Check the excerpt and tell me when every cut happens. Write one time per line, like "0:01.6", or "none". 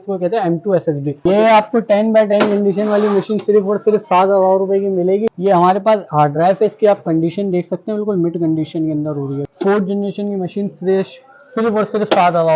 0:01.2
0:05.3
0:09.4

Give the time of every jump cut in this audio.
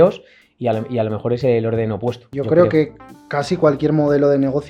0:02.3

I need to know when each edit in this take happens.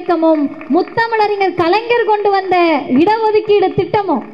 none

